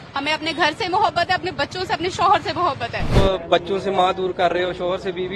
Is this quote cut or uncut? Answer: cut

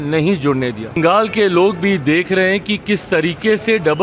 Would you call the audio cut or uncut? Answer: cut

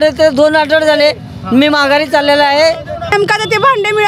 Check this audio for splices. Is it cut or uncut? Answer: cut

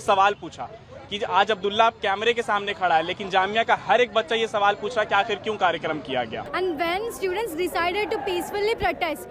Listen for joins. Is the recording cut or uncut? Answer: cut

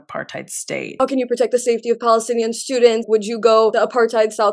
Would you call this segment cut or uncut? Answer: cut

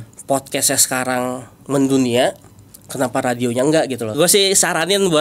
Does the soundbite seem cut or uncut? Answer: cut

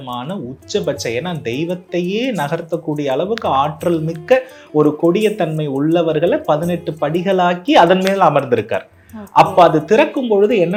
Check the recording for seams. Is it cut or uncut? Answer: uncut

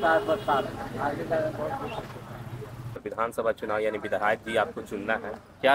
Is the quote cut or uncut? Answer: cut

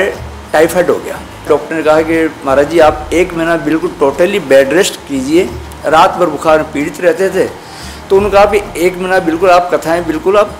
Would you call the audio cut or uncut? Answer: cut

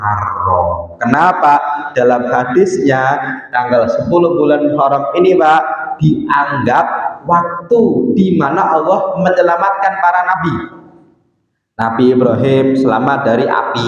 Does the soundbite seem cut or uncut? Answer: uncut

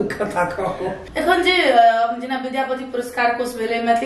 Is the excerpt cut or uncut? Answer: cut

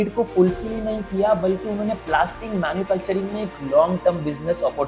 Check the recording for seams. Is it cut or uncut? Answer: uncut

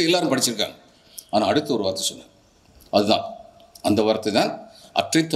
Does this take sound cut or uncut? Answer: uncut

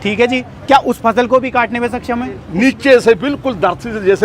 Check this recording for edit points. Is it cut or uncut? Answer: cut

